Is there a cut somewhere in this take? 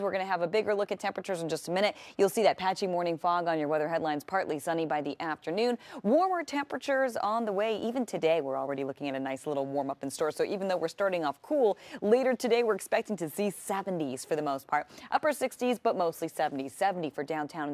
yes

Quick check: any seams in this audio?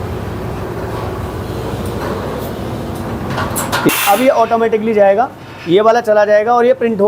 yes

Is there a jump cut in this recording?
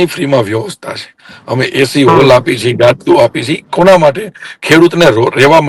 no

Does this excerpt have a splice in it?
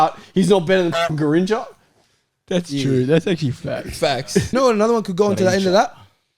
yes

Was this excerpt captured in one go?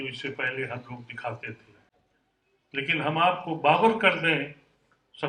yes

